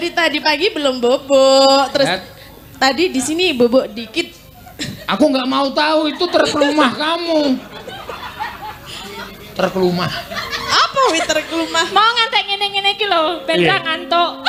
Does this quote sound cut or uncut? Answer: uncut